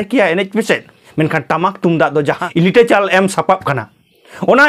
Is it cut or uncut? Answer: cut